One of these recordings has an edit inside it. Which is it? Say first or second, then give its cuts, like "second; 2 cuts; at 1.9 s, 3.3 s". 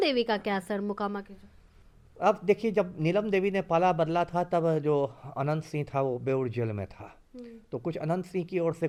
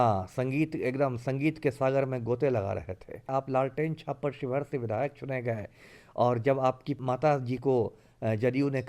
second; 2 cuts; at 3.3 s, 6.9 s